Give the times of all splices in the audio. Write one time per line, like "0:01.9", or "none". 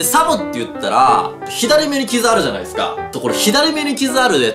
0:01.4
0:03.0